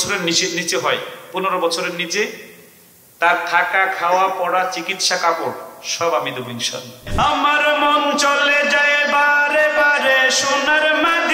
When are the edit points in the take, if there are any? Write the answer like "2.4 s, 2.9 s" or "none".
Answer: 7.0 s